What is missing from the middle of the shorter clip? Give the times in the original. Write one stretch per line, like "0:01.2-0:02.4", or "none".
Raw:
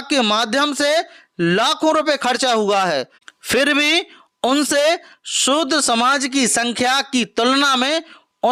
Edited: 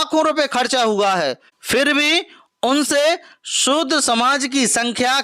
0:03.2-0:03.3

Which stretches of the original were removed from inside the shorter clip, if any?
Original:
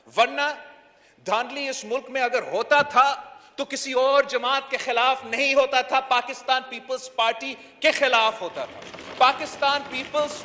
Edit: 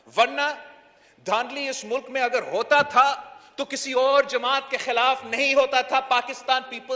none

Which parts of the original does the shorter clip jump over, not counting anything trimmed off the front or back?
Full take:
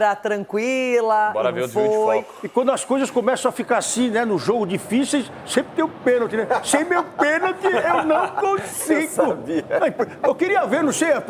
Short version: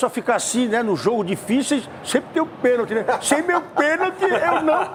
none

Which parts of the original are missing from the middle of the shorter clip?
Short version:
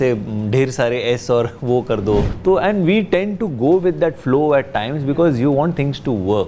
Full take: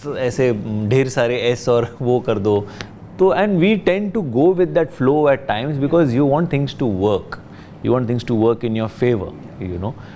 0:02.7-0:03.1

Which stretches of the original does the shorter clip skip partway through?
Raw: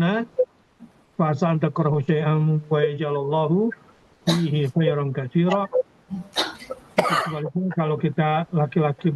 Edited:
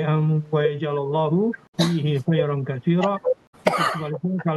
0:03.8-0:04.1
0:06.0-0:06.8

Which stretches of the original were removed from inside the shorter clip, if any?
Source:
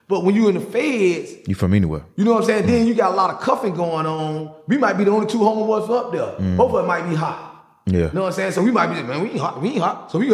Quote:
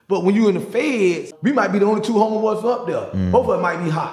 0:01.3-0:04.5

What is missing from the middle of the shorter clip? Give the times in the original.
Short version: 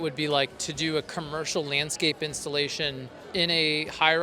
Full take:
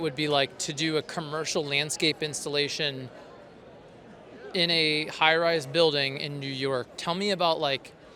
0:03.1-0:04.3

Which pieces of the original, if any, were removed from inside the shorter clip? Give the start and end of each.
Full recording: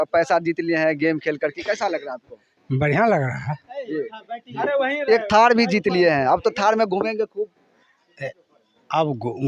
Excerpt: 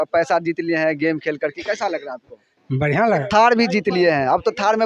0:03.3-0:05.2

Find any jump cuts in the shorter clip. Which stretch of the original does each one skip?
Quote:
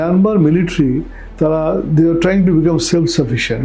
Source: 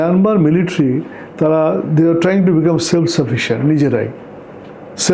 none

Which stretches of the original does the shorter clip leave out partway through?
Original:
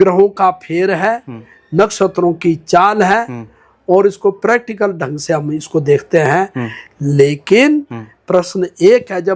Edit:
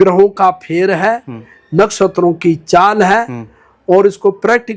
none

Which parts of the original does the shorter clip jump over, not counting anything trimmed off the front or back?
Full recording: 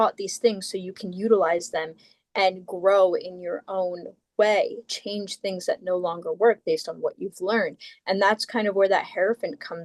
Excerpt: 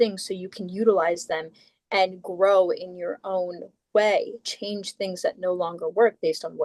none

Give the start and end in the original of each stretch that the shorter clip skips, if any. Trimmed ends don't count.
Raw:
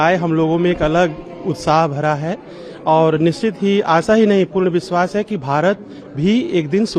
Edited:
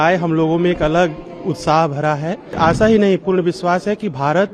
0:02.6-0:03.8

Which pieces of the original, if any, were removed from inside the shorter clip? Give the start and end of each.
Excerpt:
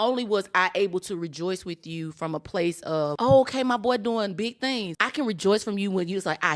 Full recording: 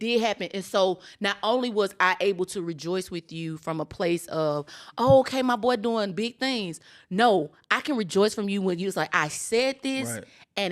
0:04.6-0:04.9
0:06.8-0:07.7

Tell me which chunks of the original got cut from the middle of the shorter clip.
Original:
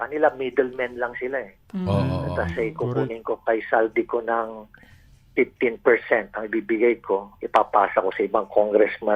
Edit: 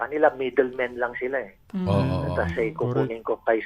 none

